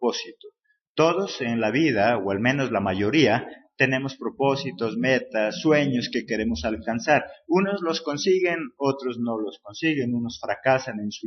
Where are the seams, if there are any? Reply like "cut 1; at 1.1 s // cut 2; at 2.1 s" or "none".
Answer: none